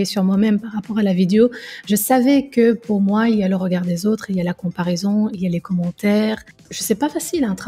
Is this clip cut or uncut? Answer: cut